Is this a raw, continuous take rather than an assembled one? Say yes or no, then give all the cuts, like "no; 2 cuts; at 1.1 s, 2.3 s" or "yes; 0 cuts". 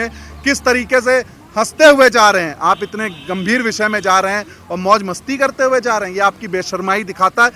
yes; 0 cuts